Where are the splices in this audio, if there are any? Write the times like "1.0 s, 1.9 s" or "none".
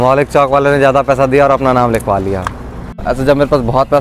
3.0 s